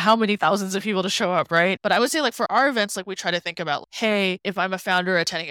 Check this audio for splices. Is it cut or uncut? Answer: cut